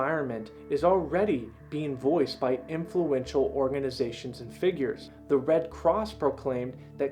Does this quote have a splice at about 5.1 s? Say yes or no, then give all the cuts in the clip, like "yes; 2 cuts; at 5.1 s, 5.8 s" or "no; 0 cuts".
yes; 1 cut; at 5.1 s